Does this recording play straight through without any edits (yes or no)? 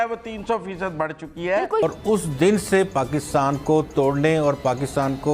no